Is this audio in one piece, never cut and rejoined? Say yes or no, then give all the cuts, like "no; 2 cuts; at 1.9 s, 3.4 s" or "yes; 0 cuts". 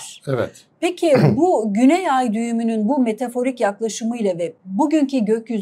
yes; 0 cuts